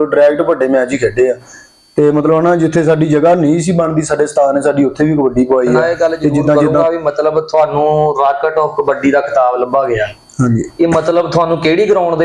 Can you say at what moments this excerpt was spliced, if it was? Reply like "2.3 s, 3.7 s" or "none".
6.7 s